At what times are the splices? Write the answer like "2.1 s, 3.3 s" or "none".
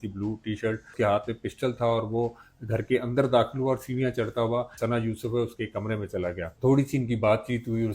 0.9 s, 4.7 s, 6.5 s